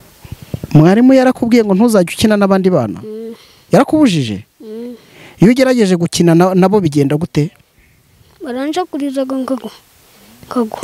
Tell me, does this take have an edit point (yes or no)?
no